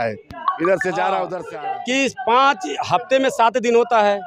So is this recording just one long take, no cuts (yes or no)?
no